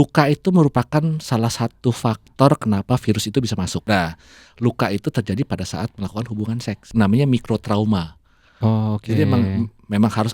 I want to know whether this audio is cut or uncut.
cut